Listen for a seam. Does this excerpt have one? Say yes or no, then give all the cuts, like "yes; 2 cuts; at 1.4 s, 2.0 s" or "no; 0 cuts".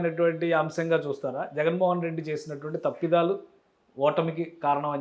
no; 0 cuts